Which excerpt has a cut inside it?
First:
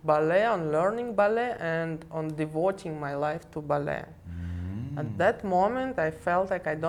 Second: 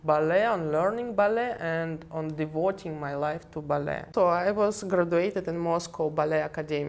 second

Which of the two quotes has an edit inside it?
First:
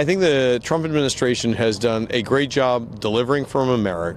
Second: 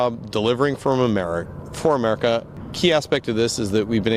second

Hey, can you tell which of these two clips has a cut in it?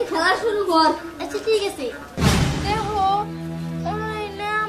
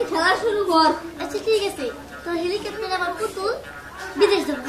first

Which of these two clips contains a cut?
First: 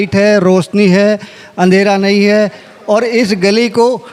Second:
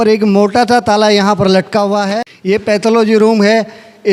second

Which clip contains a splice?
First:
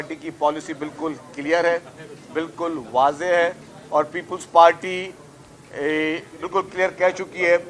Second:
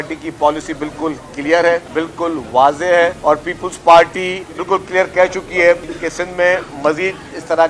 second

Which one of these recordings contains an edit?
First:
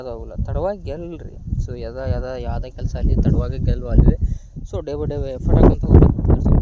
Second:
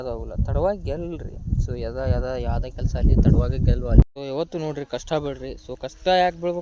second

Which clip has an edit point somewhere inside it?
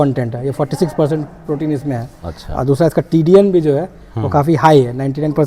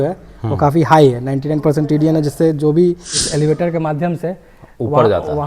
second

